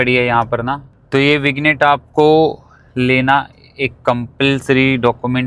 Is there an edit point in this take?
no; 0 cuts

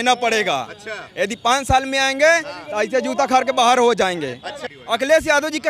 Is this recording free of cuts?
no; 1 cut; at 4.6 s

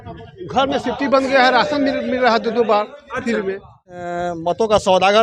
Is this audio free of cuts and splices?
no; 1 cut; at 3.8 s

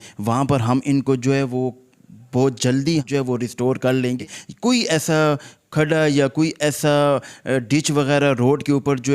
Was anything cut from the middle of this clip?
yes; 2 cuts; at 3.1 s, 4.2 s

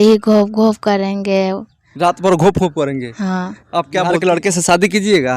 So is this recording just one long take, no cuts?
no; 1 cut; at 4.0 s

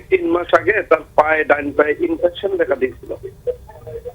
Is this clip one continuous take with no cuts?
yes; 0 cuts

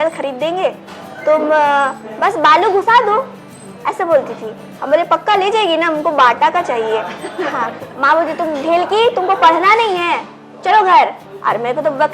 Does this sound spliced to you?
yes; 1 cut; at 7.8 s

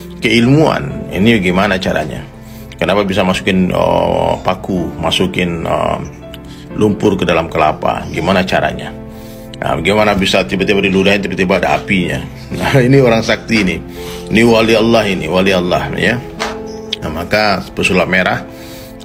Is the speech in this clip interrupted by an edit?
no; 0 cuts

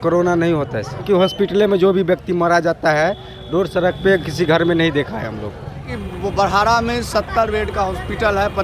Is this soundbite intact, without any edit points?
no; 2 cuts; at 1.0 s, 5.6 s

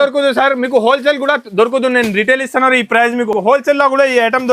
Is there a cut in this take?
no; 0 cuts

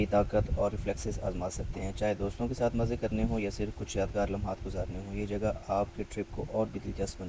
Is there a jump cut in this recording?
no; 0 cuts

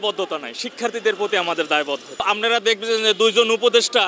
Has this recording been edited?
yes; 1 cut; at 2.2 s

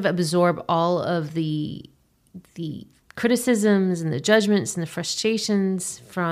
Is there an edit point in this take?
no; 0 cuts

